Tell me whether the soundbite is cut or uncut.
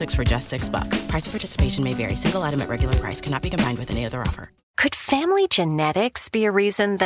cut